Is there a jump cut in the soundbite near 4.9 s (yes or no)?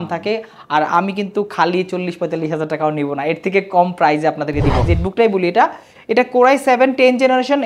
yes